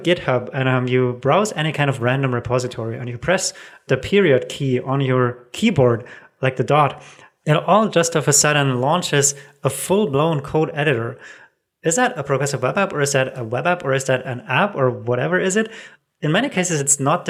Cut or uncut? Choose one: uncut